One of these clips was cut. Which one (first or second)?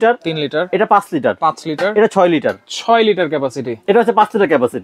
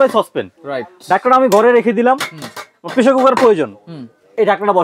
first